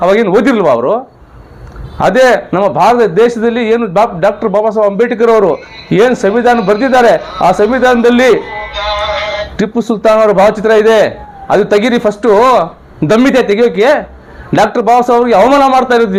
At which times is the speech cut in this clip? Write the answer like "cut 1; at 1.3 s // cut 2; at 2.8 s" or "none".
none